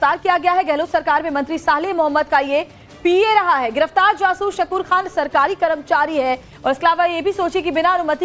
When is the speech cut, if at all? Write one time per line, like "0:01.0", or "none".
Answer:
0:06.3